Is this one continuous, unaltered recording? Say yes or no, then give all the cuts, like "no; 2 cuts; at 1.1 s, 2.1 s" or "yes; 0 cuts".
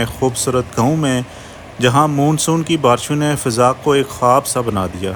yes; 0 cuts